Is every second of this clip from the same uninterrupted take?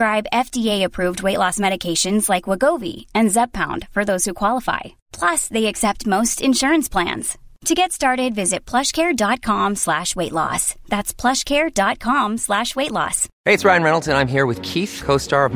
no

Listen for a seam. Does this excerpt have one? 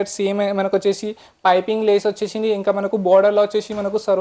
no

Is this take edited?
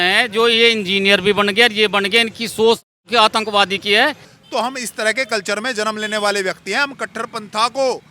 yes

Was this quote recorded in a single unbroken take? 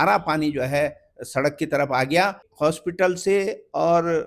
no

